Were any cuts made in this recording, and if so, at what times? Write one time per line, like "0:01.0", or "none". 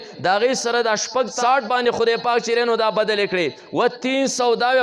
0:01.3